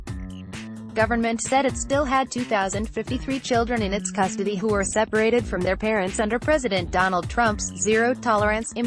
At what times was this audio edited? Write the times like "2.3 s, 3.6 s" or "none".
0.9 s

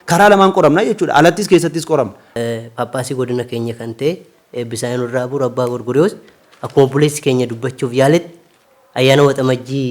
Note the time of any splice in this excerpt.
2.2 s

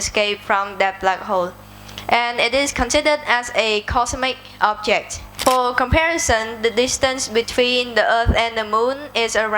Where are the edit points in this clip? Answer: 5.2 s

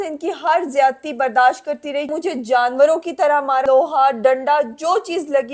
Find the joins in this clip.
2.1 s, 3.6 s

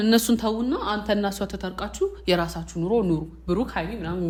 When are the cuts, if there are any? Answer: none

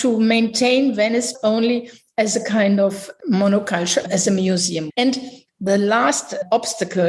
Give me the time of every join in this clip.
1.3 s, 4.8 s

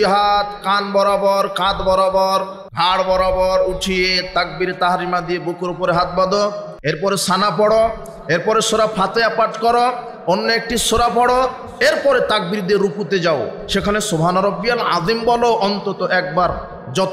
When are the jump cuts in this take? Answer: 2.6 s, 6.7 s

